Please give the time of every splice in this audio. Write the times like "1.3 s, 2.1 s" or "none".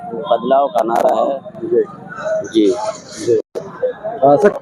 none